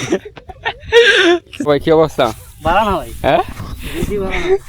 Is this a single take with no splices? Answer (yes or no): no